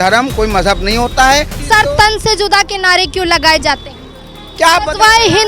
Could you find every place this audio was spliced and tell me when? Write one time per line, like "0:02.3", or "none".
0:01.6